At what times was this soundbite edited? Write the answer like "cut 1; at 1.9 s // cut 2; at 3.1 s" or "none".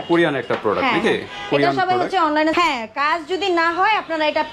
cut 1; at 2.5 s